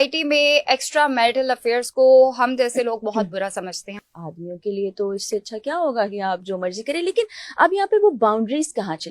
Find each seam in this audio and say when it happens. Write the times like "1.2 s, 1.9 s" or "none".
4.1 s